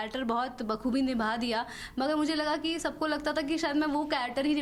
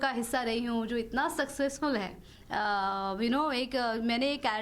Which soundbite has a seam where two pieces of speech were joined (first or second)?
second